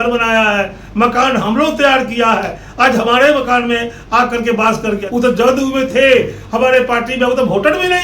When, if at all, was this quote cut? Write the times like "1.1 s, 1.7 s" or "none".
5.0 s